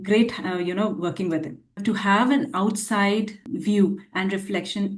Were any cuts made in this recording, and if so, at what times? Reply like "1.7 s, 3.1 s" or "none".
1.8 s, 3.4 s